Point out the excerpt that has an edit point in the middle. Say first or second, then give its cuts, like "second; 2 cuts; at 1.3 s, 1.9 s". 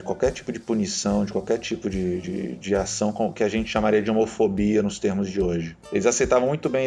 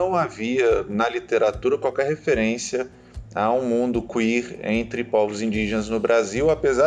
first; 1 cut; at 5.8 s